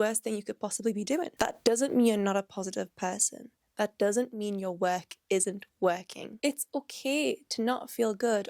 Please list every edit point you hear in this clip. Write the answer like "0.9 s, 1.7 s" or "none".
1.3 s, 6.3 s